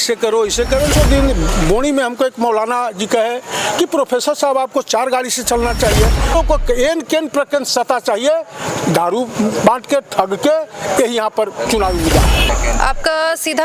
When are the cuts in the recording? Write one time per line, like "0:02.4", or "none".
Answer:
0:00.9
0:06.4
0:12.5